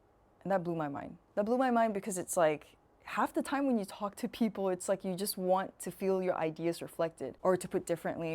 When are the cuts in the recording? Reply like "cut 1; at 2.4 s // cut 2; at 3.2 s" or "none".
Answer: cut 1; at 7.3 s